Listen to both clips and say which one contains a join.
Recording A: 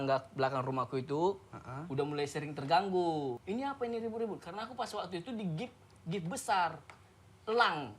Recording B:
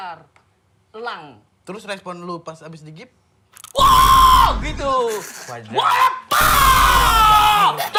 A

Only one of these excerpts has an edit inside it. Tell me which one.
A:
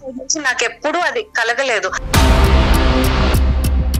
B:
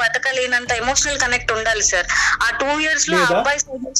A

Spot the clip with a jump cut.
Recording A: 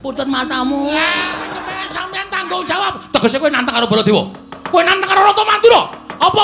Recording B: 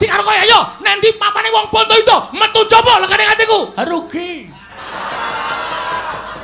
A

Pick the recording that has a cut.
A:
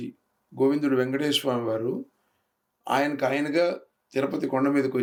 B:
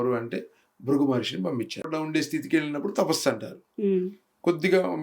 B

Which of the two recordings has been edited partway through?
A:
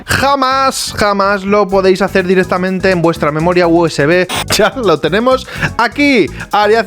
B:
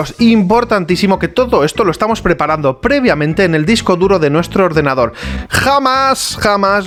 A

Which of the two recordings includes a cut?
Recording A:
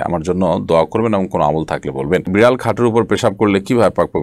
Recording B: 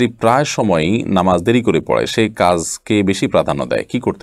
A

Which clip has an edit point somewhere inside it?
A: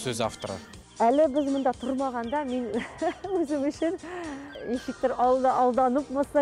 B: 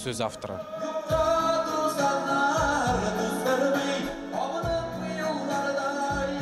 A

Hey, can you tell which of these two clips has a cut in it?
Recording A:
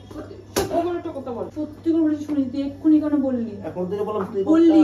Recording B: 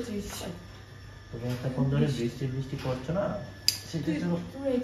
A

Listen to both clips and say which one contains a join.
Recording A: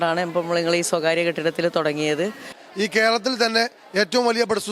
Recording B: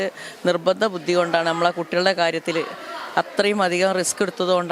A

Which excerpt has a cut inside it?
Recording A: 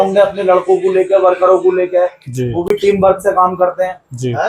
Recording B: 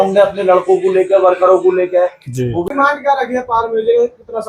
B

